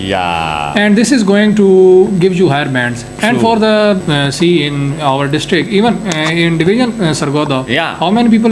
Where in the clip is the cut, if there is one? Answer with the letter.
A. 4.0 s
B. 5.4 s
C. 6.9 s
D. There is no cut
A